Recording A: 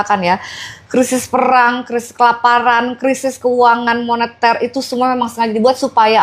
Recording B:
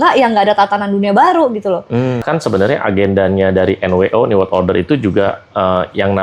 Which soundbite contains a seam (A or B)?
B